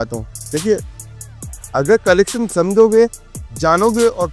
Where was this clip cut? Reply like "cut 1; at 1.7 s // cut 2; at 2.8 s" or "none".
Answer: none